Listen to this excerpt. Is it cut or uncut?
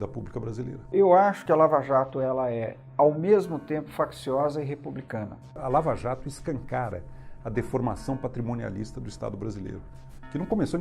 cut